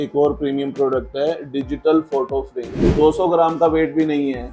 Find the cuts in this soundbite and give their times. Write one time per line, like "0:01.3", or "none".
0:02.8

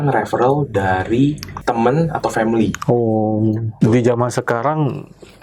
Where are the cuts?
0:01.5
0:03.8

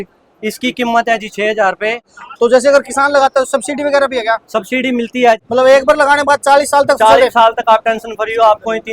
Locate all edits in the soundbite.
0:02.0
0:05.4

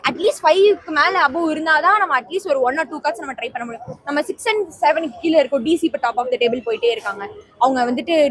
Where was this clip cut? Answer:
none

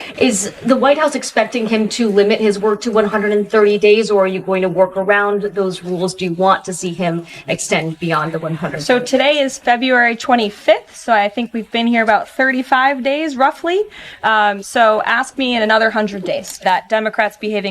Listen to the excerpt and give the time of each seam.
0:16.6

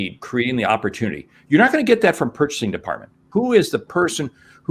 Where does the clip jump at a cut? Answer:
0:03.2

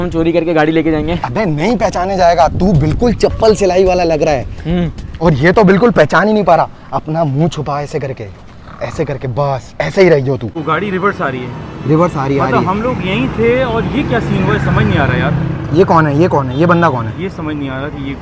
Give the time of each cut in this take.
0:10.6

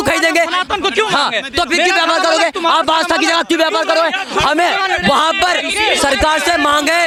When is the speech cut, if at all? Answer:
none

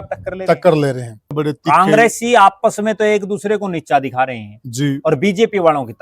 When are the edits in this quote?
0:01.3

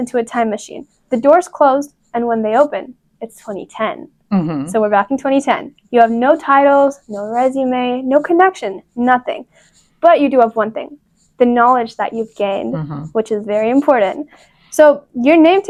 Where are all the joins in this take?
none

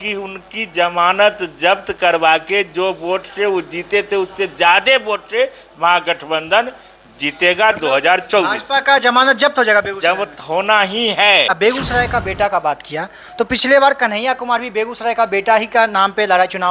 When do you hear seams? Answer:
0:11.5

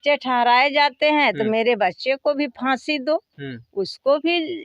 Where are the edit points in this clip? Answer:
none

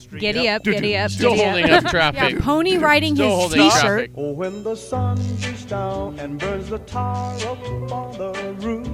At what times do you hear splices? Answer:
0:04.1

